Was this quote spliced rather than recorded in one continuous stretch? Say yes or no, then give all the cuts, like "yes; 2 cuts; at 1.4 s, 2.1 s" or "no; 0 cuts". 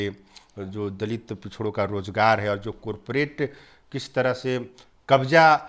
no; 0 cuts